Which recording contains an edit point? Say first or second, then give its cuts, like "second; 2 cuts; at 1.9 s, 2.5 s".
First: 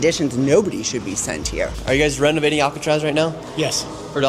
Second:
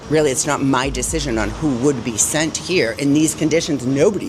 first; 1 cut; at 1.7 s